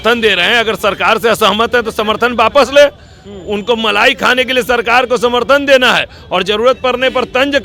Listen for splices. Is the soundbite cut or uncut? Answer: uncut